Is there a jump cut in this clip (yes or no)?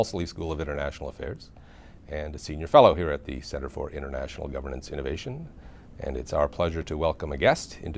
no